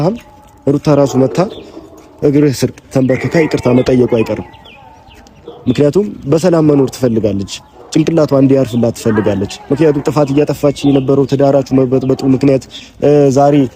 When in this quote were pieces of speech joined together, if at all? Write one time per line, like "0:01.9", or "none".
none